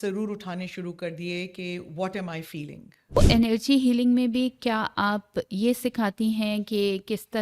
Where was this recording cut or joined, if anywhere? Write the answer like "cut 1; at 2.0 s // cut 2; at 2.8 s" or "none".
cut 1; at 3.2 s